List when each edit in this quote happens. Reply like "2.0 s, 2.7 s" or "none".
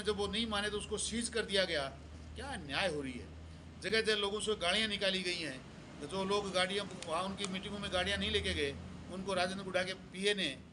none